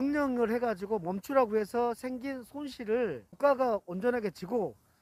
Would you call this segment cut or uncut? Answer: uncut